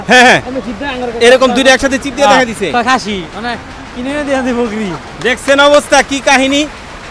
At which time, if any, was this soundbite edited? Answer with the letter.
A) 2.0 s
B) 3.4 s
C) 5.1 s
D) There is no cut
D